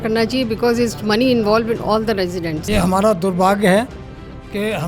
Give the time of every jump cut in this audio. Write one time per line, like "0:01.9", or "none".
0:02.6